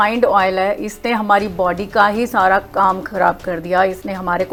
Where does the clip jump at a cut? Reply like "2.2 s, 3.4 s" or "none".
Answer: none